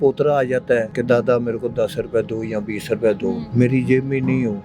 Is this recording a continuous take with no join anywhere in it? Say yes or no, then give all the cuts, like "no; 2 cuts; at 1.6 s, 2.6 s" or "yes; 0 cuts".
no; 2 cuts; at 0.9 s, 3.4 s